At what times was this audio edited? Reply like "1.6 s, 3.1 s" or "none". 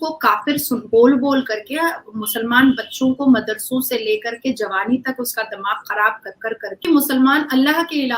6.8 s

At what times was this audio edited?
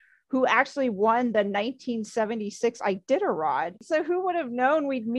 3.8 s

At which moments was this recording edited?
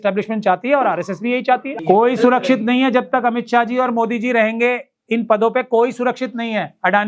1.7 s

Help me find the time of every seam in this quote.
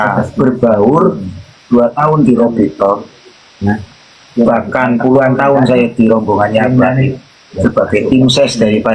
none

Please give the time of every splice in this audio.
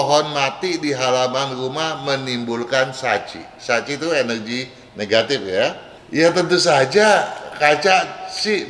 5.9 s

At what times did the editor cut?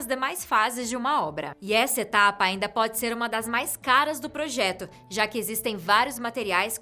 3.3 s

